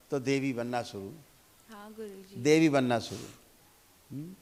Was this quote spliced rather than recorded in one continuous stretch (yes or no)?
no